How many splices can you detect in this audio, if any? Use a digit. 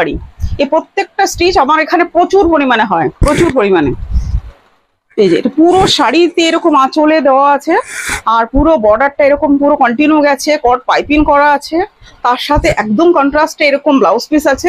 0